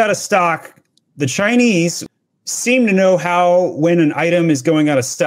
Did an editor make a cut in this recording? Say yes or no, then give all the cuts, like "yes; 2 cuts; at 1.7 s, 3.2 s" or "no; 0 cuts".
yes; 1 cut; at 2.0 s